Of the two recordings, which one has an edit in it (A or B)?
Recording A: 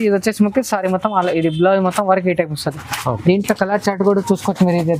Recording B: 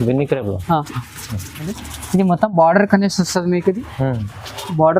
B